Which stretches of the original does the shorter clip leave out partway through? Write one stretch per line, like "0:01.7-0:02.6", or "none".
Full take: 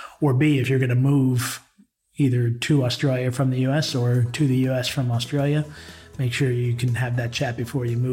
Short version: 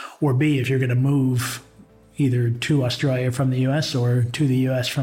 none